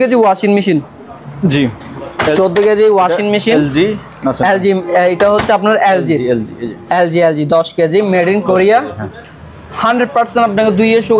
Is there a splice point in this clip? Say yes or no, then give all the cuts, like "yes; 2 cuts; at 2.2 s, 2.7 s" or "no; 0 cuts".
no; 0 cuts